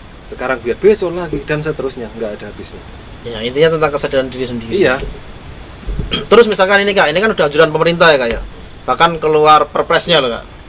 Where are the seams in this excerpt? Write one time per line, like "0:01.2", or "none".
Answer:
none